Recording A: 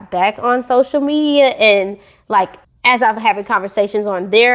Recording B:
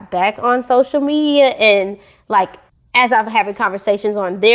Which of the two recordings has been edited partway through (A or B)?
A